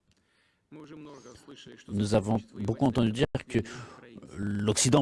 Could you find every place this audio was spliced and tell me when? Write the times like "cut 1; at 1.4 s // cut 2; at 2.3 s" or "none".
none